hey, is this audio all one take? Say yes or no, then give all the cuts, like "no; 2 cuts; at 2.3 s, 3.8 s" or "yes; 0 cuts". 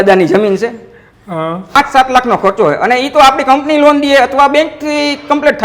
no; 1 cut; at 1.7 s